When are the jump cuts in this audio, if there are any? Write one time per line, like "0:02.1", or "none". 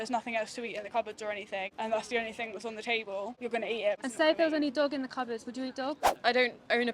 0:01.7
0:03.8
0:06.1